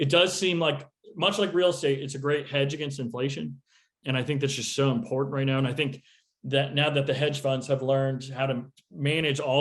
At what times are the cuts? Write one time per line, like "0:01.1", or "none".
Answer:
0:04.0